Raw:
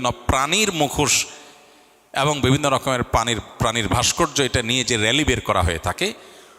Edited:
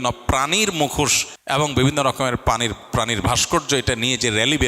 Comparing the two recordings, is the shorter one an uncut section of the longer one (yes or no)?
no